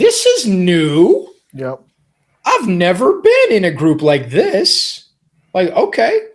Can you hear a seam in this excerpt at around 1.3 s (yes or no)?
no